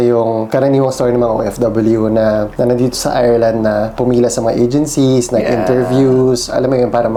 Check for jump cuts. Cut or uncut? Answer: uncut